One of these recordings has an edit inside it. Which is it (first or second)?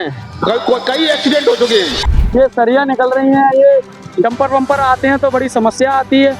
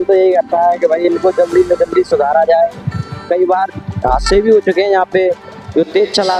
first